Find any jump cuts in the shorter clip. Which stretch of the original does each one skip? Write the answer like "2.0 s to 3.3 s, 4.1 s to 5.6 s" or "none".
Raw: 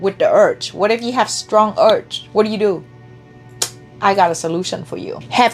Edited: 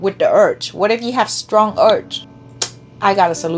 2.2 s to 3.2 s